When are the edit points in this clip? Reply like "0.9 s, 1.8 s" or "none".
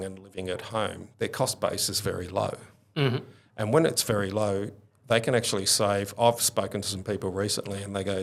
none